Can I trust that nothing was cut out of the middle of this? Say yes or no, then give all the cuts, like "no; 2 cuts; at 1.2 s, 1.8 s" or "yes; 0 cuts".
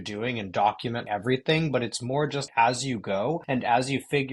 no; 3 cuts; at 1.0 s, 2.5 s, 3.4 s